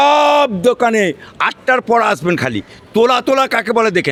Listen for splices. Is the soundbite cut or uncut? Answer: uncut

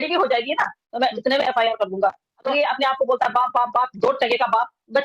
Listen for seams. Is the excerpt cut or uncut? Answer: cut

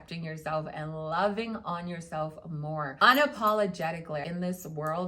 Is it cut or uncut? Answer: cut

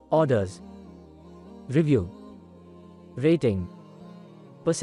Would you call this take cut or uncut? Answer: uncut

